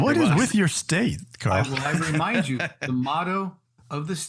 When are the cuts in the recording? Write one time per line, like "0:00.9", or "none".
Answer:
none